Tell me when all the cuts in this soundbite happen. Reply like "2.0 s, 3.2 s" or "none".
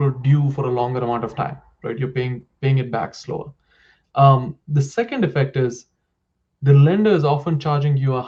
none